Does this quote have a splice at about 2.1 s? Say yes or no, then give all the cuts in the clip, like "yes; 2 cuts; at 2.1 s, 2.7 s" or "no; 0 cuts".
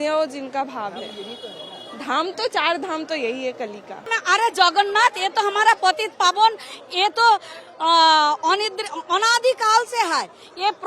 no; 1 cut; at 4.1 s